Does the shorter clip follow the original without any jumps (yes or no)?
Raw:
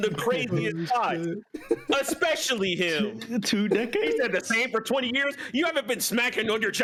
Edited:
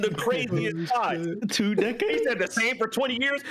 no